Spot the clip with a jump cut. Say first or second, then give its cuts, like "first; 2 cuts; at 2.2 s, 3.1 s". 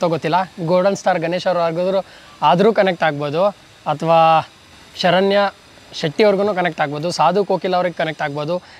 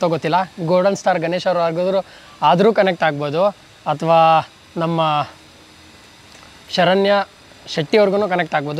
first; 1 cut; at 4.6 s